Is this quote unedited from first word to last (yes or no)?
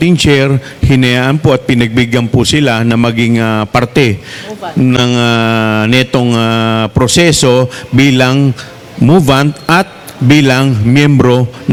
yes